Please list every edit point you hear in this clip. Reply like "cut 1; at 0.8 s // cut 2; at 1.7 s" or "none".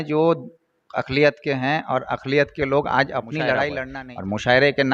cut 1; at 3.9 s